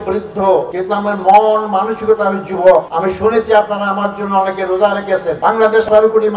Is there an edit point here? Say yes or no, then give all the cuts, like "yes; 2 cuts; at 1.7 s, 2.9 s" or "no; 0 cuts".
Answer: yes; 2 cuts; at 2.9 s, 5.3 s